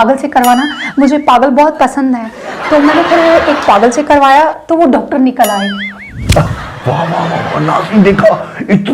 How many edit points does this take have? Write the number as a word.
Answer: one